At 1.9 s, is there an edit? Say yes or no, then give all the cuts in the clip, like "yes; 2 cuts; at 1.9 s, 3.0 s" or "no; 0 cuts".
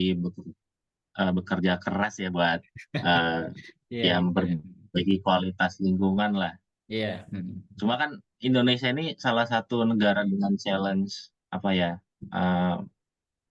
no; 0 cuts